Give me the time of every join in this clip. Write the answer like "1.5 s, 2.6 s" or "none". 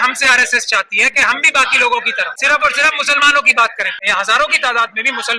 2.4 s, 3.9 s